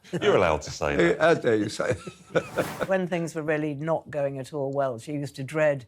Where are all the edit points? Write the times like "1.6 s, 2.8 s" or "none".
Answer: 2.9 s